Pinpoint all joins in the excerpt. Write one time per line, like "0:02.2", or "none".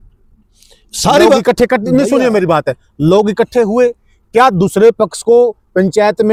none